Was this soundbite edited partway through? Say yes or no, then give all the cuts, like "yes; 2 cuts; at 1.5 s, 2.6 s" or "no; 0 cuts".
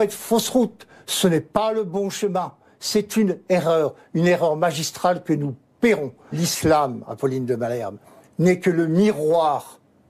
yes; 1 cut; at 6.4 s